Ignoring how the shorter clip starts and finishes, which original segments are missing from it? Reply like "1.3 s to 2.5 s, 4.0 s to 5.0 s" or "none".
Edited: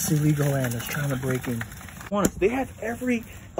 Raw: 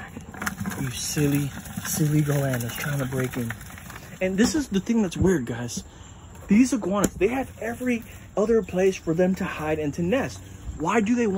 4.0 s to 6.9 s